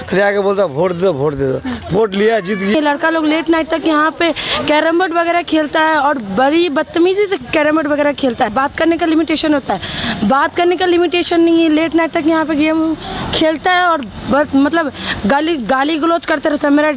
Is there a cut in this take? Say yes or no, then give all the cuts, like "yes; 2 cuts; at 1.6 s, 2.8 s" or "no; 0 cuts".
yes; 2 cuts; at 2.7 s, 8.5 s